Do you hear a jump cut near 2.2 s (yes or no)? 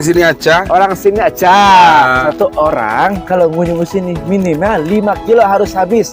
yes